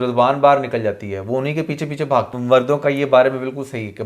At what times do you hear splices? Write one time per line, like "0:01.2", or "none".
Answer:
0:02.3